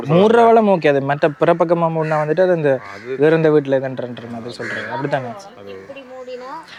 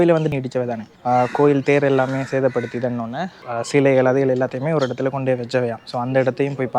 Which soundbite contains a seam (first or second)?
second